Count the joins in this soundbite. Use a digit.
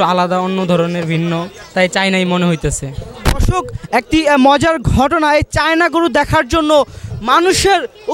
0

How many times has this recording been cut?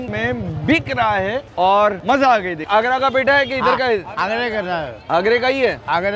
0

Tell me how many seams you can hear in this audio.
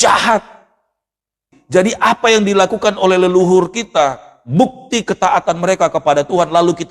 1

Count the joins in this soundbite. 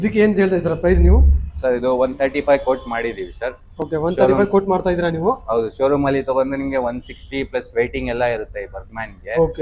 0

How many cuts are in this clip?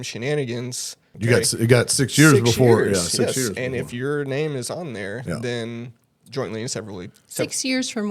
1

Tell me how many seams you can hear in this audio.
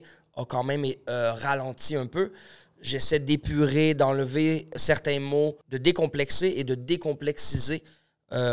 1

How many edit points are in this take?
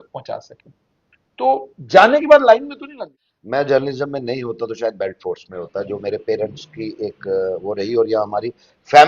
1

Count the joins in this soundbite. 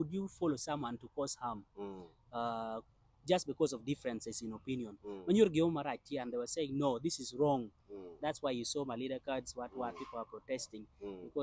0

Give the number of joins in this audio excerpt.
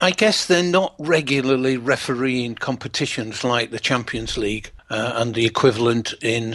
1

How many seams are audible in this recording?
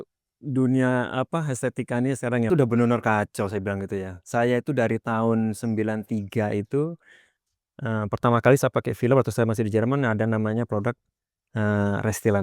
1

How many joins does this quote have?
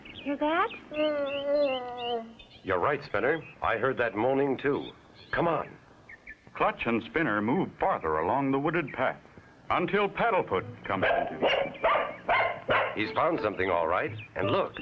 1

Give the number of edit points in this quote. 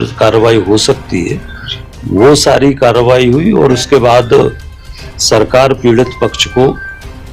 0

